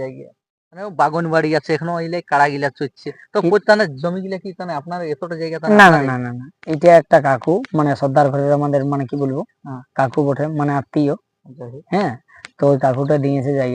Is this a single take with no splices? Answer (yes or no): yes